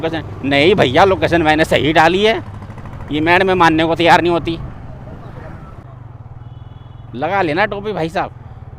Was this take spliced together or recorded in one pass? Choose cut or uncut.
cut